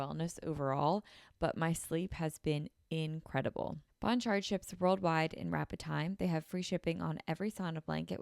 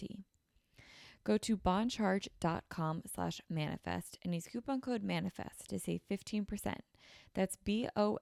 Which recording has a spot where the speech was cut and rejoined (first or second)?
first